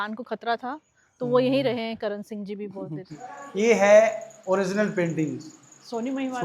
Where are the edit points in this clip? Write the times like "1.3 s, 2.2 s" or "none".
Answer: 3.2 s